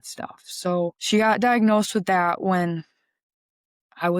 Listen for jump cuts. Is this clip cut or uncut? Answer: cut